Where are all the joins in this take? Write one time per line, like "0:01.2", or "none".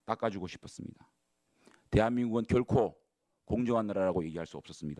none